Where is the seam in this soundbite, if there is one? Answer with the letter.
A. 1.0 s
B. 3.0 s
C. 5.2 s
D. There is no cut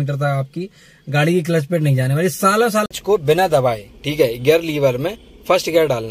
B